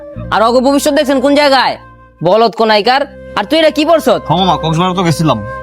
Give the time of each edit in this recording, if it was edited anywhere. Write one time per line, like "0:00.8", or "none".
0:04.2